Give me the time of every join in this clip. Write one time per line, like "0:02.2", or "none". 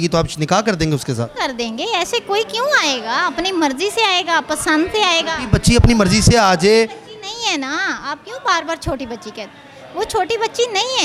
none

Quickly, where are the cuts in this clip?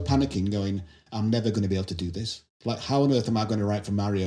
none

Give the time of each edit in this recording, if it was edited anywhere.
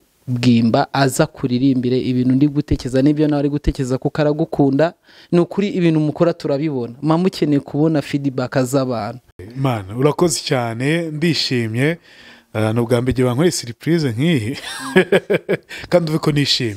0:09.5

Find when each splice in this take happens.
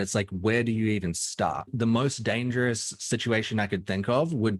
0:01.7

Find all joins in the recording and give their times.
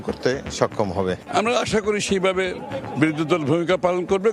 0:01.2

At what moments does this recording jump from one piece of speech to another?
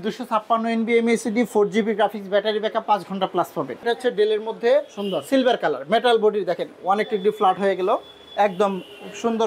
0:03.8

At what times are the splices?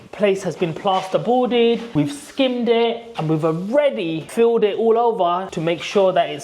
0:01.9

